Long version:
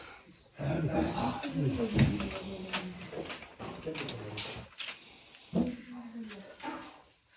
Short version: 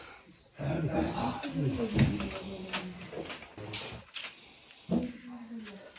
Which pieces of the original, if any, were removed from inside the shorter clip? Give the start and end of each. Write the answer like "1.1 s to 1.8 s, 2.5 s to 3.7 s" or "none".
3.6 s to 4.2 s